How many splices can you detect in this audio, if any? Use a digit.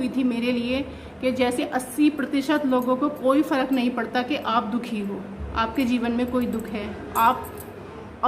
1